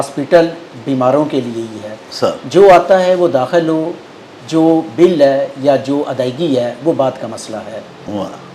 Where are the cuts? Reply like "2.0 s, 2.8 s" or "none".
none